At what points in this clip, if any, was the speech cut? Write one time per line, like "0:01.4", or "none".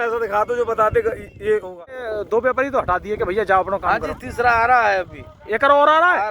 0:02.0